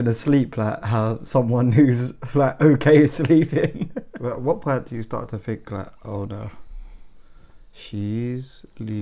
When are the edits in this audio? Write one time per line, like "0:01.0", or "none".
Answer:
0:04.1